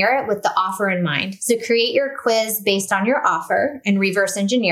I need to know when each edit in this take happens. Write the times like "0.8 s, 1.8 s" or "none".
1.3 s